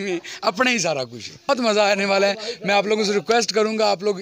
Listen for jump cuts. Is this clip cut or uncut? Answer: cut